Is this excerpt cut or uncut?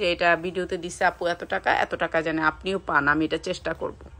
uncut